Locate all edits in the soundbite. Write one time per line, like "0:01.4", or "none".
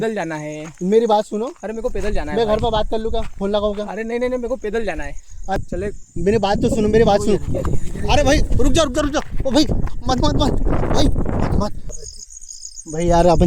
0:05.6
0:11.9